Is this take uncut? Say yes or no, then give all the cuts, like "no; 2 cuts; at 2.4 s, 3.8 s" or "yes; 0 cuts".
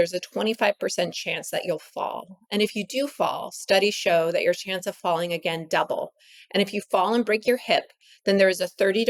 yes; 0 cuts